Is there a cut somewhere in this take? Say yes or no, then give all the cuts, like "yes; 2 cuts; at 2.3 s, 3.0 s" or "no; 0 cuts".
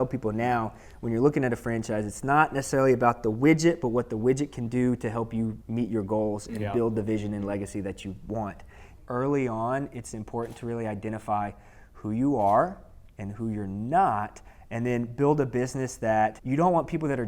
yes; 3 cuts; at 5.6 s, 8.9 s, 16.4 s